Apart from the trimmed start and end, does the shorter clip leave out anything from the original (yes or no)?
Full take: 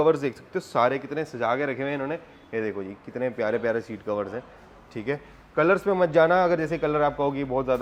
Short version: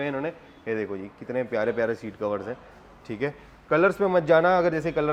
no